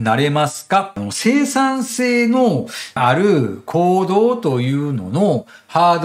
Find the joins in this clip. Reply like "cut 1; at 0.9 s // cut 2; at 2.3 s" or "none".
cut 1; at 1.0 s